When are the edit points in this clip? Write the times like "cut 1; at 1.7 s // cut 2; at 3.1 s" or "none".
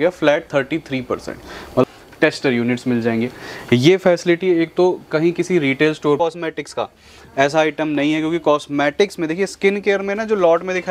cut 1; at 1.8 s // cut 2; at 6.2 s